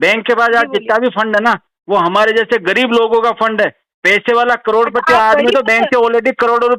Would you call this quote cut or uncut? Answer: uncut